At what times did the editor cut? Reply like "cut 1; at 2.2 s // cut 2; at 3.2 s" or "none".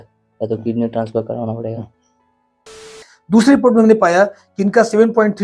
cut 1; at 2.8 s